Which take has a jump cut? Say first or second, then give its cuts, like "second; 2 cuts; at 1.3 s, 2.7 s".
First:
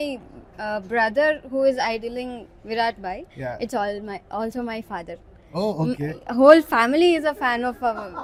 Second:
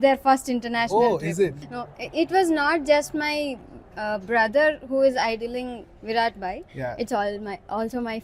second; 1 cut; at 1.7 s